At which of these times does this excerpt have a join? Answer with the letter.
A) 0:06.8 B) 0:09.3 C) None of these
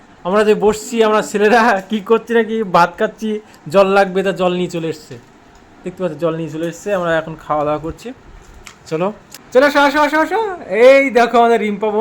B